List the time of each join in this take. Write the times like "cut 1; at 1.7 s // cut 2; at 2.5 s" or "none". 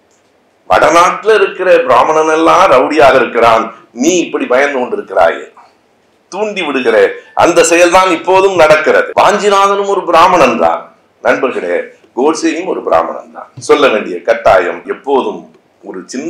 cut 1; at 9.1 s // cut 2; at 14.8 s